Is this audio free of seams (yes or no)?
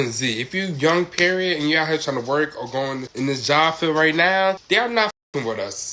yes